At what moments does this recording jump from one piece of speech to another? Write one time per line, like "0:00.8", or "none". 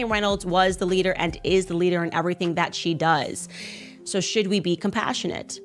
none